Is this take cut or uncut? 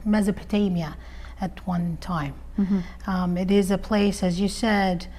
uncut